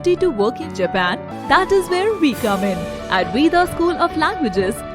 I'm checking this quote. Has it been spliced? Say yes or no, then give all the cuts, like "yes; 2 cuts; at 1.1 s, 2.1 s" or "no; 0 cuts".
yes; 1 cut; at 1.3 s